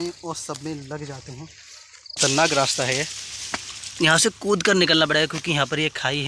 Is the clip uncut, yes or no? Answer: no